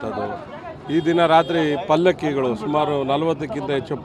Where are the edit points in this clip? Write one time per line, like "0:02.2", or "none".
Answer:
none